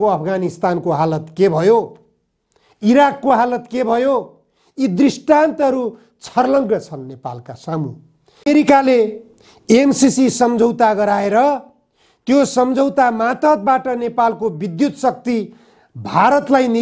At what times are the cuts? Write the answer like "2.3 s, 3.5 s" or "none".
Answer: 8.5 s